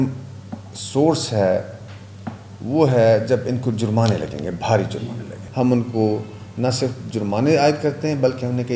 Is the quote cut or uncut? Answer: cut